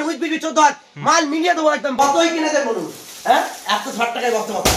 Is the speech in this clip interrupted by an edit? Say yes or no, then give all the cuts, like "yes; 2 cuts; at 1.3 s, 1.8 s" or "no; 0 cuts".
yes; 1 cut; at 1.9 s